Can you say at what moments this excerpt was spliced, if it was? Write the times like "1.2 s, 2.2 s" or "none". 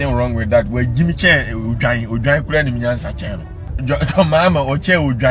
3.8 s